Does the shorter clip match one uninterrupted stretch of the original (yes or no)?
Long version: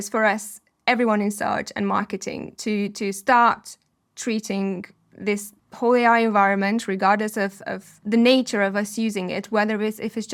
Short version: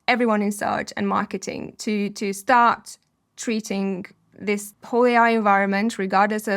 no